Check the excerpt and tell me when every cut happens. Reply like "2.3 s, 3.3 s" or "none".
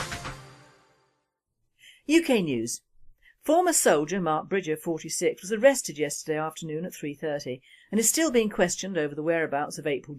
4.8 s